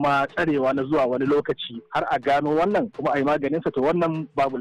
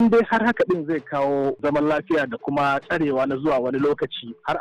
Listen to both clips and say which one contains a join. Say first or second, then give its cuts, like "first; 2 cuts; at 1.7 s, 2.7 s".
second; 1 cut; at 1.6 s